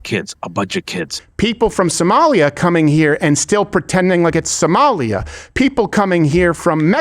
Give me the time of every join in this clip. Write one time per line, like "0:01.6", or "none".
0:01.2

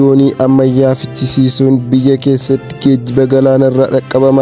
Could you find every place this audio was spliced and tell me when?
none

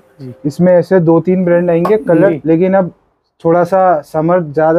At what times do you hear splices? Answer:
0:02.3

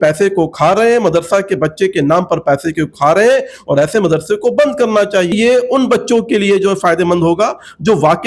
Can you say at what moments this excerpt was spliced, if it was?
0:05.3

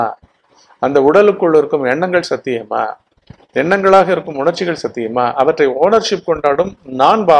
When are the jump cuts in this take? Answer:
none

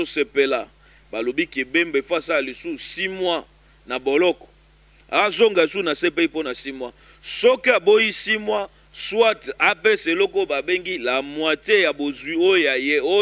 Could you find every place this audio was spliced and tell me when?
none

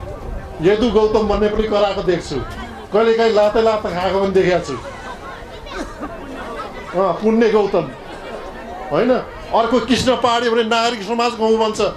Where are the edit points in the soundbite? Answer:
none

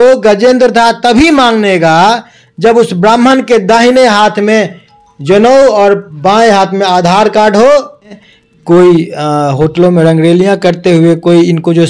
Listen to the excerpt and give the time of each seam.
0:08.2

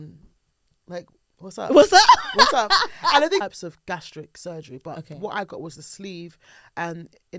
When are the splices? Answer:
0:03.4

